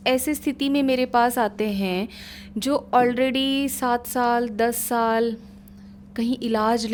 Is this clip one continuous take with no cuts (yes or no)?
yes